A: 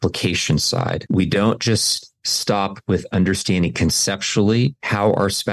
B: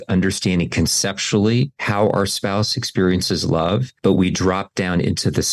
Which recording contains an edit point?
A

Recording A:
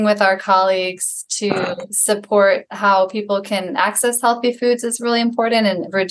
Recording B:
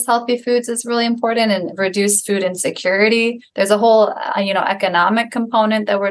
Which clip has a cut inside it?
A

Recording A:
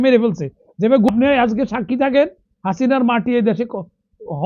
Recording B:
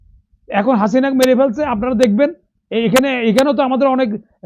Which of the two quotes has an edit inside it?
A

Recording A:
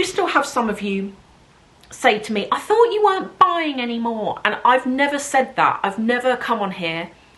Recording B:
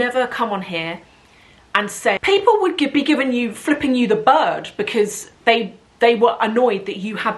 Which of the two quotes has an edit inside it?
B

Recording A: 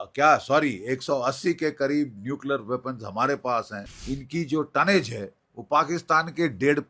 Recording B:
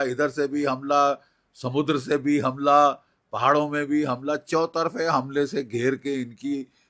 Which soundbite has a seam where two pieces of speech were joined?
A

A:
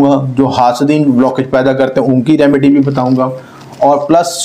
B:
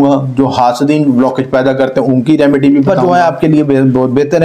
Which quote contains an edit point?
B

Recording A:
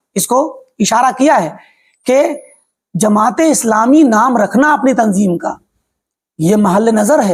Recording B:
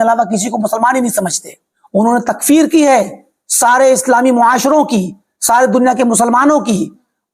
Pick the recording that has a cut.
B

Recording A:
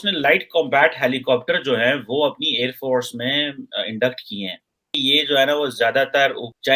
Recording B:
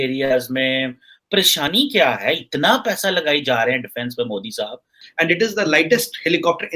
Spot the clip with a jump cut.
B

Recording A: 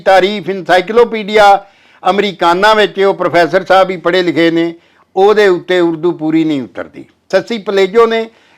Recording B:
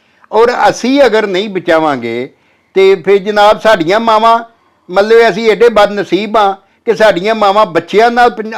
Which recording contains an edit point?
A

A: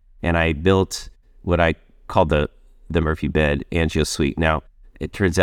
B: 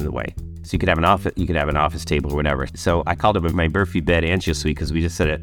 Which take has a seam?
A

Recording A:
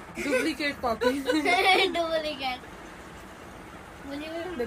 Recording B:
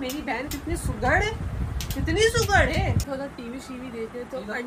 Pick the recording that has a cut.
B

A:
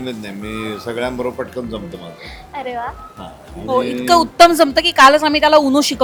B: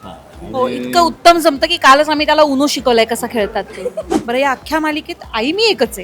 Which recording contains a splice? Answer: B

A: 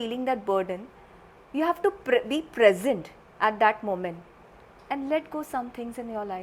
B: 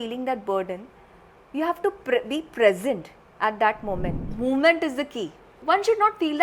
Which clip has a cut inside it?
B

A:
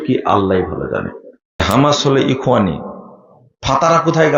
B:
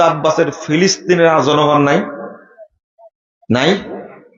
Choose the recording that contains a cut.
A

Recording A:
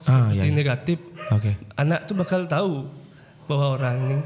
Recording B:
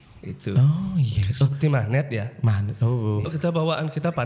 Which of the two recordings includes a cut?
B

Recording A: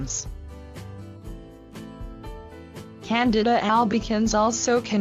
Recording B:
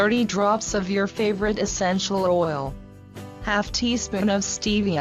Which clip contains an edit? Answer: A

